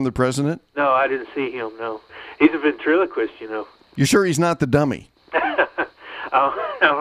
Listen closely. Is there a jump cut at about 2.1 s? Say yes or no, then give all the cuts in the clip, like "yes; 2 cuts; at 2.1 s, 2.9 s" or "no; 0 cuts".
yes; 2 cuts; at 2.1 s, 3.8 s